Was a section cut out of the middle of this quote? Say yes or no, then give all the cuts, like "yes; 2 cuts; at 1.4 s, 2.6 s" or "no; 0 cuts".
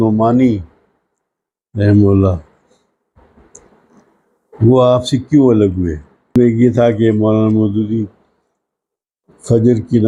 yes; 1 cut; at 6.3 s